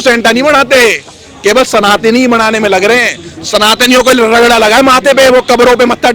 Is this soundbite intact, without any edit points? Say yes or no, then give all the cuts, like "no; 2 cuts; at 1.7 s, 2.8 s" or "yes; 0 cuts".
yes; 0 cuts